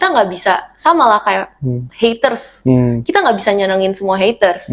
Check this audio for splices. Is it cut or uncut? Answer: uncut